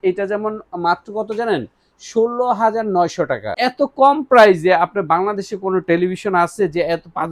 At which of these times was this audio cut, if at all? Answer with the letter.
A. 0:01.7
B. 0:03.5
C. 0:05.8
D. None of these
B